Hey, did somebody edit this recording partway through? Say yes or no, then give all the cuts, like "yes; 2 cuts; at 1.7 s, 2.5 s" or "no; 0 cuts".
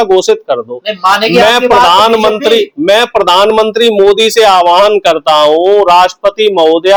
no; 0 cuts